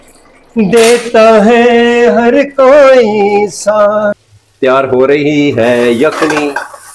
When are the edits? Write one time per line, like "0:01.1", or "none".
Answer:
0:04.3